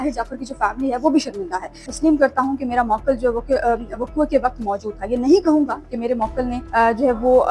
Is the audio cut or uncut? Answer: cut